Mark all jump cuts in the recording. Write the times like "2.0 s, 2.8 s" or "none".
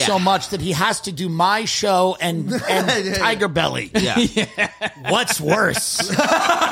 none